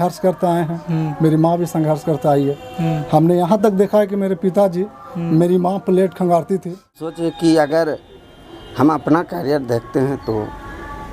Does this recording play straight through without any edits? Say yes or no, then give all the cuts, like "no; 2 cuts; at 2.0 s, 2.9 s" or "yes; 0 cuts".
no; 1 cut; at 7.2 s